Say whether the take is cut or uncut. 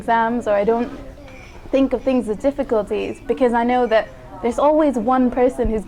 uncut